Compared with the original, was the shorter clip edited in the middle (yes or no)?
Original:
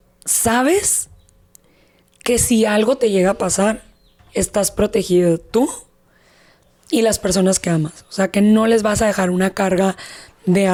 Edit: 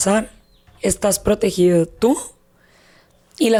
no